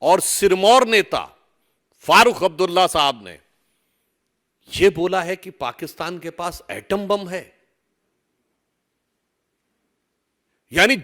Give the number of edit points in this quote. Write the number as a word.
zero